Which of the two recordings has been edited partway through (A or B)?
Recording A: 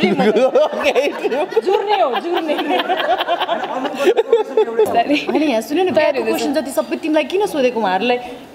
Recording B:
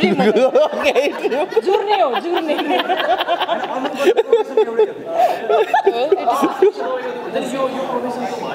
A